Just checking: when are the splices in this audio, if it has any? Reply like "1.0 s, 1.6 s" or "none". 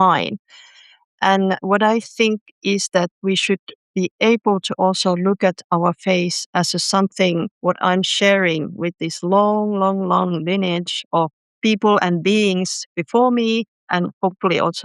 13.9 s